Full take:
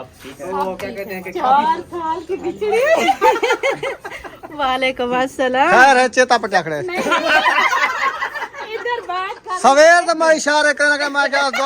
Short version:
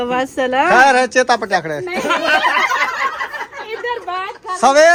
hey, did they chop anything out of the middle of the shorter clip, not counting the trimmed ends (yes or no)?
no